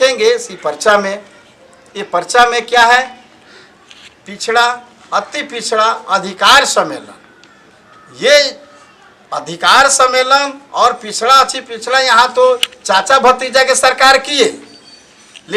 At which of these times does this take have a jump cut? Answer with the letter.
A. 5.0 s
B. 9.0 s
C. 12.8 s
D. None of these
D